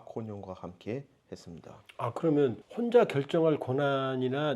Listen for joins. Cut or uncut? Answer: uncut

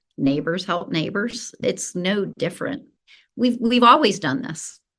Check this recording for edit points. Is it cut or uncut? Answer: cut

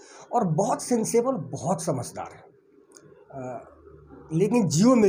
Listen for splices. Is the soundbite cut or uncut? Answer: uncut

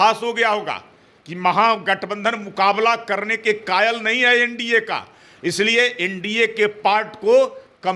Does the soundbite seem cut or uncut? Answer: uncut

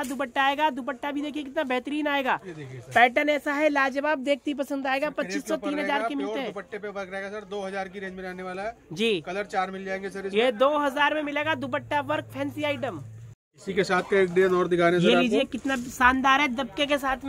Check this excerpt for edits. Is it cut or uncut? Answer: uncut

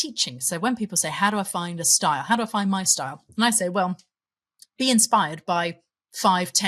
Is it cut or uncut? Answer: cut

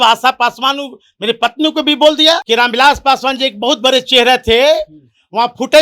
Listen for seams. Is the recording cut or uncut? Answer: cut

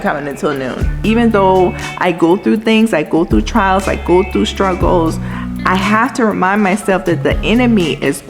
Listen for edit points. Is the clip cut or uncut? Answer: cut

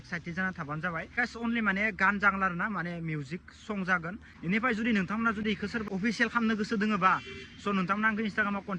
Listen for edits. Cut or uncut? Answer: cut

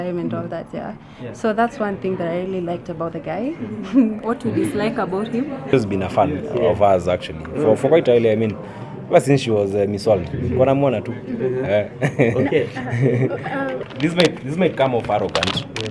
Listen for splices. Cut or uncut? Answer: cut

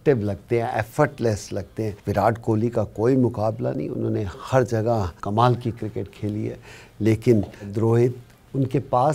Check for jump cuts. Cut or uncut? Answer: cut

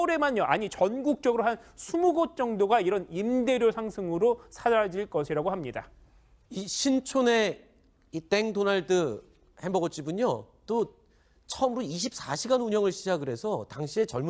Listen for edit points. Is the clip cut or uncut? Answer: cut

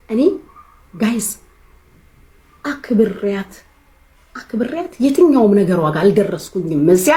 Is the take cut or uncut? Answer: uncut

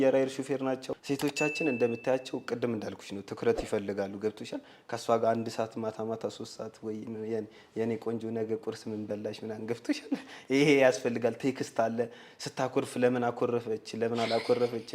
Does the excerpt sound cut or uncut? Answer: cut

